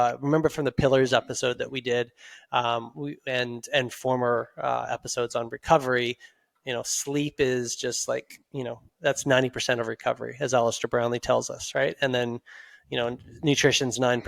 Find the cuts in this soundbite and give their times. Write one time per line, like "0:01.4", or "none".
none